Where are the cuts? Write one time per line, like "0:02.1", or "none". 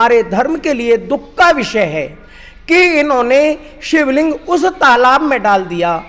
none